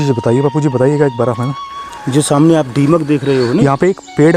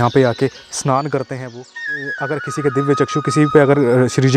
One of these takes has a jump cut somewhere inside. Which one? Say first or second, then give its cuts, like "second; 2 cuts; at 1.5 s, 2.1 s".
second; 1 cut; at 1.9 s